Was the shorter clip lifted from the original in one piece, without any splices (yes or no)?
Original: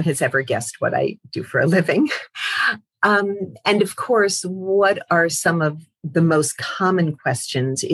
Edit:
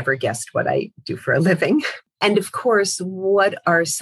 no